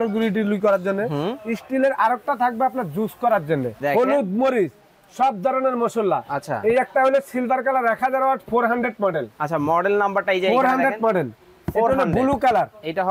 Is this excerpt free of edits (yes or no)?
no